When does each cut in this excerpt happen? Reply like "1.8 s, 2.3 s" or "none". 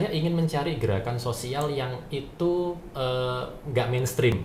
none